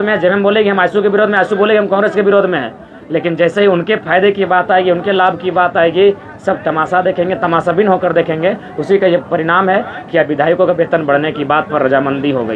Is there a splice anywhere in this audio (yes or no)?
no